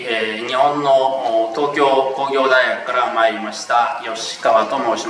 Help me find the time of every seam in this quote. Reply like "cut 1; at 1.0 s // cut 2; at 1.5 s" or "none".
none